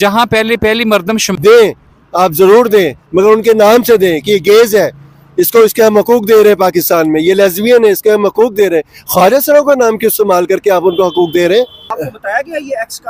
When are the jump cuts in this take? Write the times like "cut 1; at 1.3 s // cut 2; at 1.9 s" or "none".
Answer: cut 1; at 1.3 s // cut 2; at 11.8 s